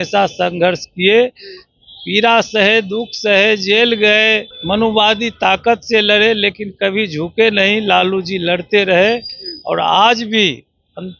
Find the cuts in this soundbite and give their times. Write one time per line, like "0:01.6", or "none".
0:04.5